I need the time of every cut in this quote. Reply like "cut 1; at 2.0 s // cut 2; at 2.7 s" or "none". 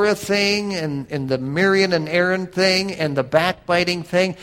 cut 1; at 1.0 s